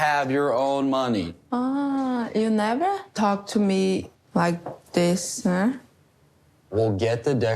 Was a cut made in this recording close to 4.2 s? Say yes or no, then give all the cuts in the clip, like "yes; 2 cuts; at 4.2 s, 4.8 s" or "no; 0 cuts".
yes; 2 cuts; at 3.1 s, 4.2 s